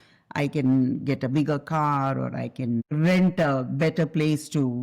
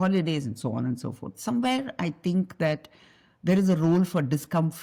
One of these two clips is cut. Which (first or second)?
first